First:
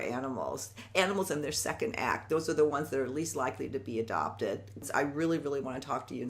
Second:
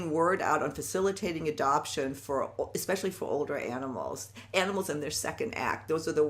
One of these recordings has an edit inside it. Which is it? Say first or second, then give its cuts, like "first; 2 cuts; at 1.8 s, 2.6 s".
first; 1 cut; at 4.8 s